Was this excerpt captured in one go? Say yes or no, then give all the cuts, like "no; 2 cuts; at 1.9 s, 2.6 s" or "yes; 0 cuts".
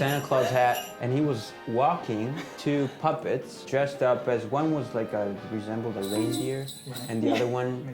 no; 2 cuts; at 2.5 s, 3.6 s